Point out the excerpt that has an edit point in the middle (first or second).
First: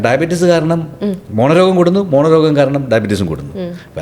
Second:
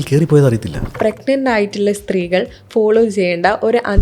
second